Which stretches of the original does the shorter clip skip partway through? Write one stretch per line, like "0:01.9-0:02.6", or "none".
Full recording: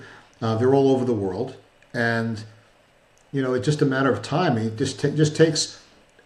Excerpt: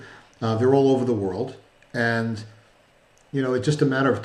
none